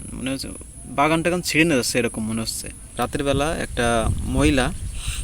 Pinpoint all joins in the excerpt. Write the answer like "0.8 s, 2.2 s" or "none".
2.8 s